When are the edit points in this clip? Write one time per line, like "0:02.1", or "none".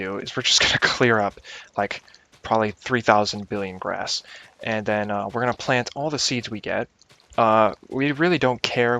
0:03.8